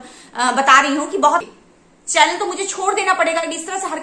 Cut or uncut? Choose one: cut